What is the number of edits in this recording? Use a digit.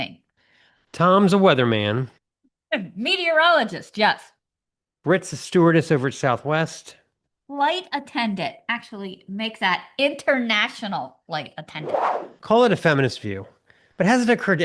1